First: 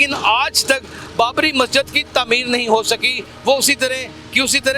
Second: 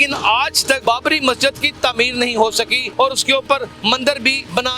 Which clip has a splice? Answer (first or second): second